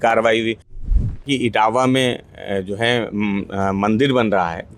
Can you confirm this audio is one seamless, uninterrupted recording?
no; 1 cut; at 1.2 s

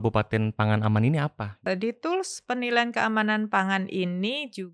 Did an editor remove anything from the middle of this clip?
yes; 1 cut; at 1.6 s

